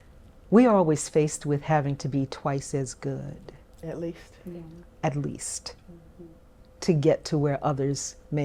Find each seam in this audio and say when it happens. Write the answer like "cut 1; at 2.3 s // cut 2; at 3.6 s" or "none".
none